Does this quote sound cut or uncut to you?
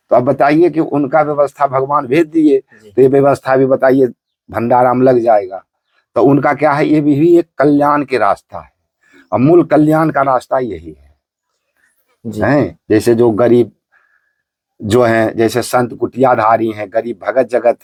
uncut